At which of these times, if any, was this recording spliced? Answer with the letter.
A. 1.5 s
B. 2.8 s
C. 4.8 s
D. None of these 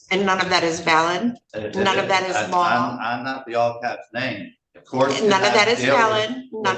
A